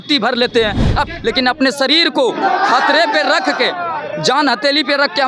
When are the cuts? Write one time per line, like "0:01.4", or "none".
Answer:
0:01.1